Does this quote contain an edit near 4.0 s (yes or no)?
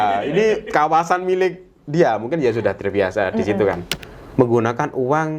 yes